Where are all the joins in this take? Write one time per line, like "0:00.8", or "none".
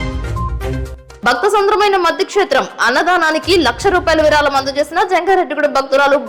none